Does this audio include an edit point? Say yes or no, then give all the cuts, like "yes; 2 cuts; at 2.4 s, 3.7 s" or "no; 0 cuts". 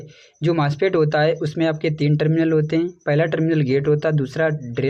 no; 0 cuts